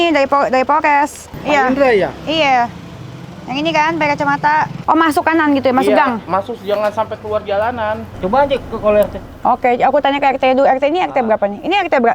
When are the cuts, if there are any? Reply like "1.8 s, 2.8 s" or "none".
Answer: 1.3 s, 4.8 s, 8.1 s